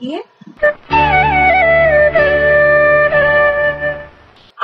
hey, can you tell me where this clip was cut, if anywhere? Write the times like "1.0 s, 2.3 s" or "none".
none